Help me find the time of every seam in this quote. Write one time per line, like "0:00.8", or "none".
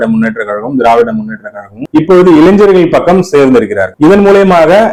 none